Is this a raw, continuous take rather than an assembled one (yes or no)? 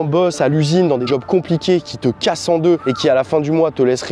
no